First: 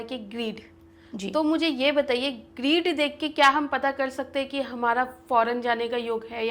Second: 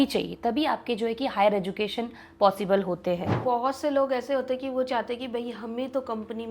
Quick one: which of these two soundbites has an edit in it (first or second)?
second